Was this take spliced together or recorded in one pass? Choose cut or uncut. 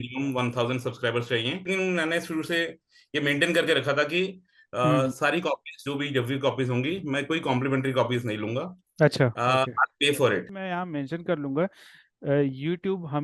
cut